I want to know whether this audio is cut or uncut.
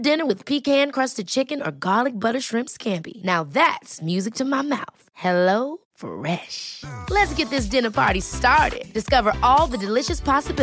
uncut